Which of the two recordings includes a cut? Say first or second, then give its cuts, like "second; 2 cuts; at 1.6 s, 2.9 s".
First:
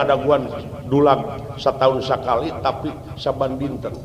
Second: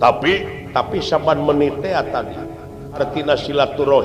second; 1 cut; at 3.0 s